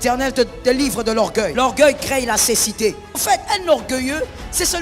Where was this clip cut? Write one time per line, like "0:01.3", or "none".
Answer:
0:01.5
0:03.2